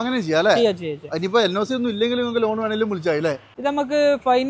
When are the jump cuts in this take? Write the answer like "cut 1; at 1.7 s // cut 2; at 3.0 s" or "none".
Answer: cut 1; at 3.5 s